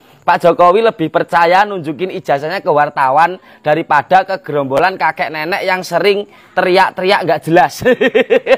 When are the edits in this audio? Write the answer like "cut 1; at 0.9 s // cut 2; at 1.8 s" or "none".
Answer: none